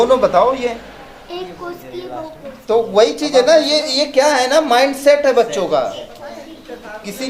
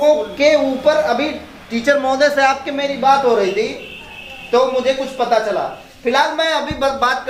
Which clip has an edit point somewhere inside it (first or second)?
first